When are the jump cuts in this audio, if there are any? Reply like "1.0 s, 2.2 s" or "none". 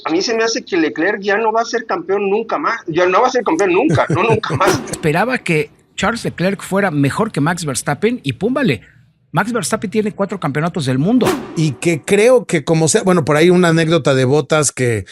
4.9 s, 11.4 s

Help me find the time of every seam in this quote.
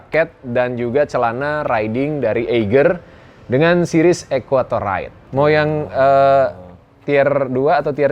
5.1 s

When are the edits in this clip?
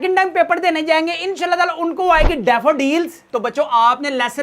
3.2 s

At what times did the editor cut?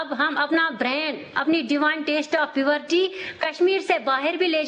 none

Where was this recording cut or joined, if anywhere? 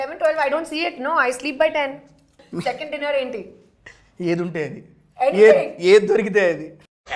2.4 s

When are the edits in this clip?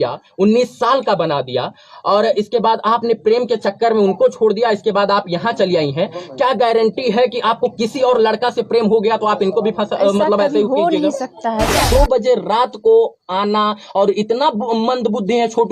11.8 s

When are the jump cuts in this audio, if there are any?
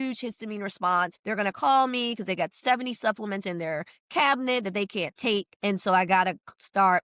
1.2 s, 5.5 s

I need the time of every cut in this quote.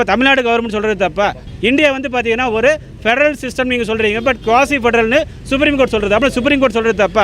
1.5 s

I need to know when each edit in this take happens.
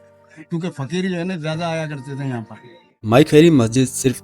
2.9 s

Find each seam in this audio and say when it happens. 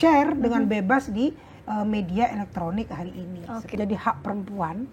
3.8 s

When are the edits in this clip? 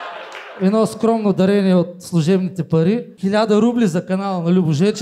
3.1 s

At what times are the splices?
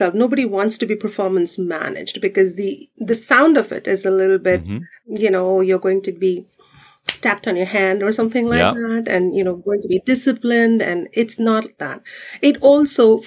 2.9 s

